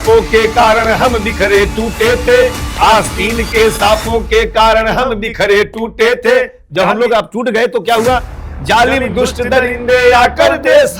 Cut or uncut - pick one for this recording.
uncut